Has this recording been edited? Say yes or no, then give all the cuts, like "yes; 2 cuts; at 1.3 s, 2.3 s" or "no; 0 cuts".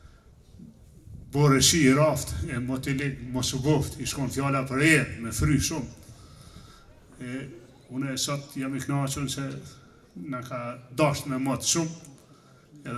no; 0 cuts